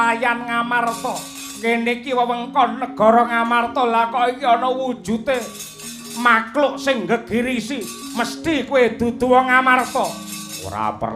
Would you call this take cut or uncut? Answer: cut